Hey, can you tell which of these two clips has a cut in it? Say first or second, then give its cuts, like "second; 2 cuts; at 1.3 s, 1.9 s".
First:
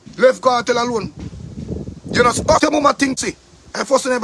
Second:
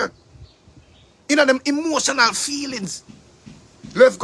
first; 1 cut; at 2.6 s